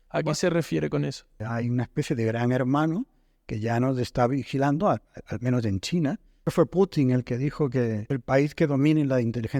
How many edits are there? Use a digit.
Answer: 3